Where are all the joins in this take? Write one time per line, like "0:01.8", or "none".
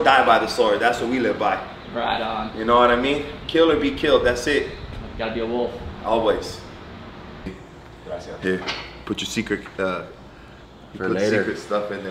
0:07.5

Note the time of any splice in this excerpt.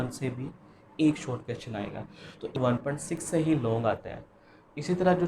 0:02.6

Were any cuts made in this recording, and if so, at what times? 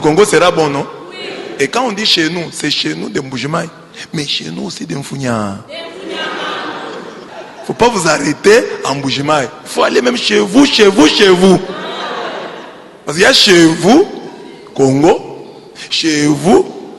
0:07.3

